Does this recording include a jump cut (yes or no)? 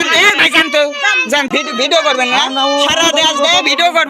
yes